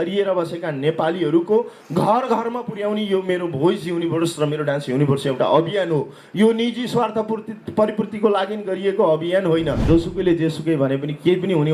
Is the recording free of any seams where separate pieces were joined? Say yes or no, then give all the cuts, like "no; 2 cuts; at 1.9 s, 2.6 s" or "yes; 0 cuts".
no; 1 cut; at 9.8 s